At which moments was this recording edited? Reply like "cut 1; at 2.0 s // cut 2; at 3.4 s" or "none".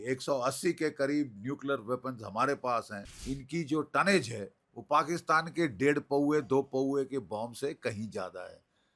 cut 1; at 3.2 s